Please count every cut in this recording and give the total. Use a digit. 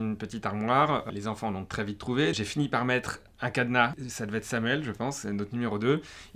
2